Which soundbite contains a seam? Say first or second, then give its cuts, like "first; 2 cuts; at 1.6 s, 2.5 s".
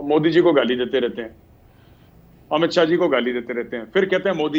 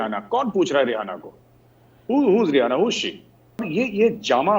second; 1 cut; at 3.7 s